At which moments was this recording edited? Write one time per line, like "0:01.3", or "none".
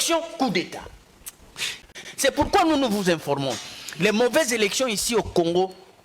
0:01.9